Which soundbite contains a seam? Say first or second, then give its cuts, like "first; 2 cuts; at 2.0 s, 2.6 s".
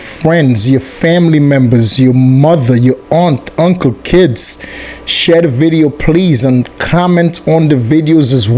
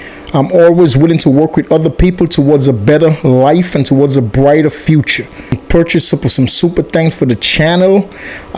second; 1 cut; at 5.6 s